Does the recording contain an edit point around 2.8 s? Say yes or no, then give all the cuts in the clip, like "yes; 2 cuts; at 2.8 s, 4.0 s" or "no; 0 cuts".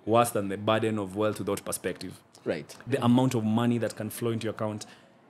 yes; 1 cut; at 2.8 s